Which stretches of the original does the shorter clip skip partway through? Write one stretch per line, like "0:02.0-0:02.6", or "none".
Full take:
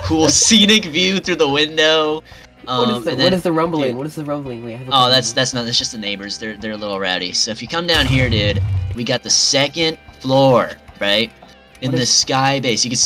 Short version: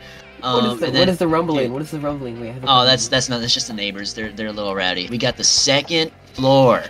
0:07.3-0:08.9